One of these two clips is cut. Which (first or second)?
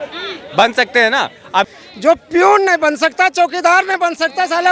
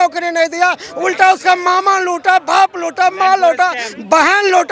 first